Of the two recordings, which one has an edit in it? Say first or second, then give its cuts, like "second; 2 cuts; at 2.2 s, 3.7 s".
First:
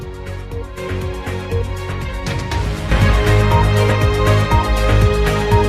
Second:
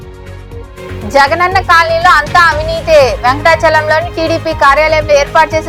first; 1 cut; at 1.0 s